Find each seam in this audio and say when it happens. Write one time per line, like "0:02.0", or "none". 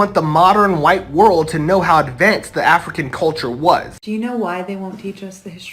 0:04.0

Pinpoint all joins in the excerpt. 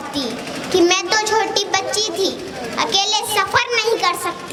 none

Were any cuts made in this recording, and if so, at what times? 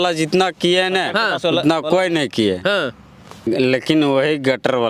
0:03.3

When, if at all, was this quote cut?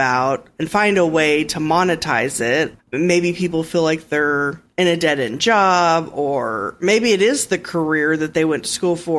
0:02.7

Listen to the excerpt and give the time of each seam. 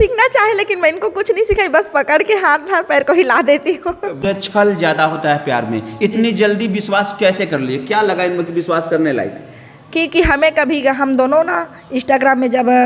0:04.2

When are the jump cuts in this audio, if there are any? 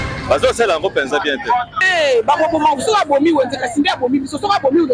0:01.7

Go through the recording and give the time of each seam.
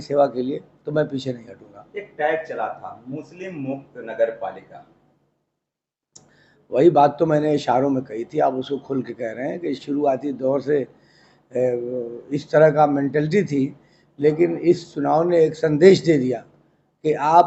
none

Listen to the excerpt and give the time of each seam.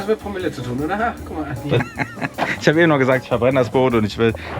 0:01.8

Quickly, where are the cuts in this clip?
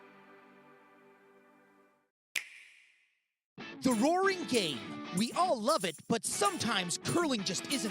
0:02.1

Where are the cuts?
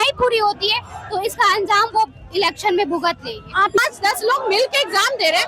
0:03.8

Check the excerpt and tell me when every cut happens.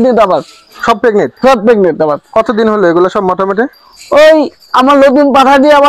none

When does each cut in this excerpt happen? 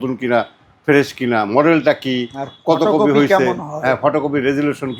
none

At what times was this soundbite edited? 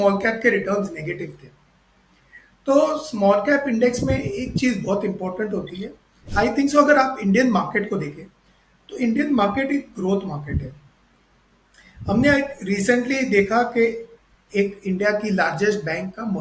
0:06.2

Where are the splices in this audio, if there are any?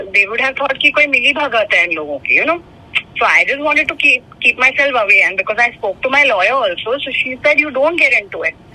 none

